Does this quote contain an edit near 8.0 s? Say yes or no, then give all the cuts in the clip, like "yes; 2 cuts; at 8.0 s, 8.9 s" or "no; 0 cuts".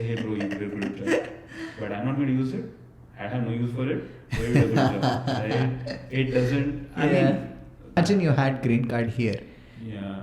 yes; 1 cut; at 8.0 s